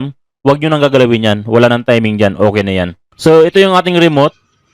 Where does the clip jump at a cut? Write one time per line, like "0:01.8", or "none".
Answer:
0:03.0